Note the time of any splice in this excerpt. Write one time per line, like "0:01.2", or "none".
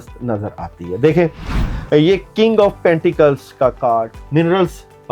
0:04.2